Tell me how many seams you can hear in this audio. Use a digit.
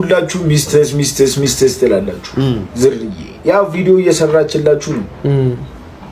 0